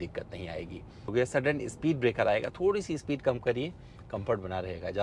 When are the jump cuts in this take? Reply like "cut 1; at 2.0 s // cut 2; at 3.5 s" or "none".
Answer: cut 1; at 1.1 s